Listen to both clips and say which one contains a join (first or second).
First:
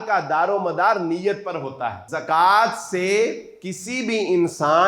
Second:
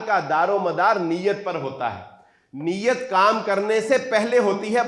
first